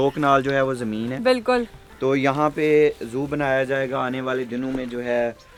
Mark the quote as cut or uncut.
uncut